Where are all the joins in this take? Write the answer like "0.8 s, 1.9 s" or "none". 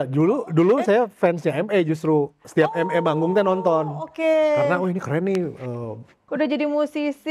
6.2 s

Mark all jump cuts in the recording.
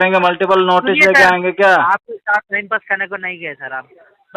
none

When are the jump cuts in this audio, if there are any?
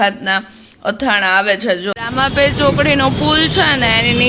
1.9 s

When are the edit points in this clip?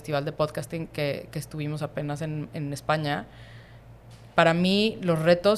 none

